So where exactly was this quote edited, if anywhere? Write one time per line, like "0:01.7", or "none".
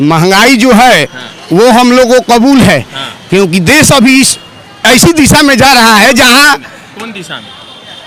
none